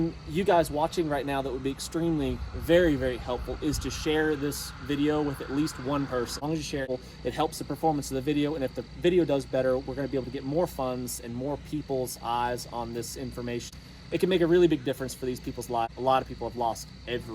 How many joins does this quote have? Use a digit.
3